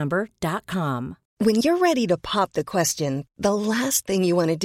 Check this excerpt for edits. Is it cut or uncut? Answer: cut